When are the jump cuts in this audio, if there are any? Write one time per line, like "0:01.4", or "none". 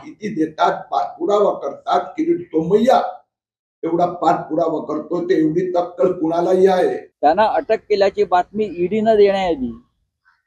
0:07.1